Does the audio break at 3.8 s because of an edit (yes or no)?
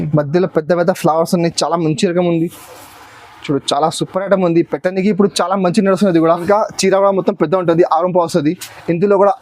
no